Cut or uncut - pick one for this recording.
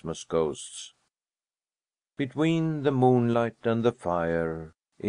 cut